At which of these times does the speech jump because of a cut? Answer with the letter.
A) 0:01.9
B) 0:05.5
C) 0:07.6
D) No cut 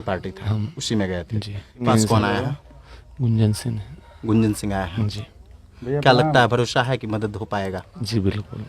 A